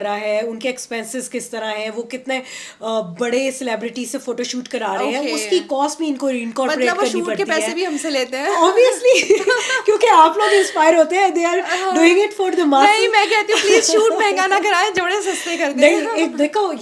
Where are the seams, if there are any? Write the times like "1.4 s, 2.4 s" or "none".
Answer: none